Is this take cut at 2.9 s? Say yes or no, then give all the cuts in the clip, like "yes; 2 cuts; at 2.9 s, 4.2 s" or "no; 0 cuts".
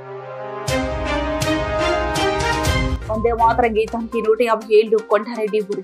yes; 1 cut; at 2.9 s